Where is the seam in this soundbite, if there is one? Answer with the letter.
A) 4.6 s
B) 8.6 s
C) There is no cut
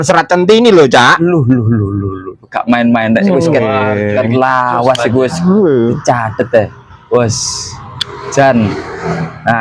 C